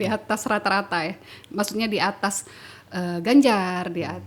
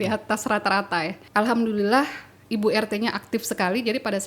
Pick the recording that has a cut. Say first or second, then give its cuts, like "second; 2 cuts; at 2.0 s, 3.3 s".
second; 1 cut; at 1.2 s